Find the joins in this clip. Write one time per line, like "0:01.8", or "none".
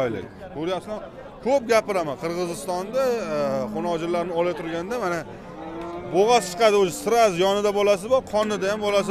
none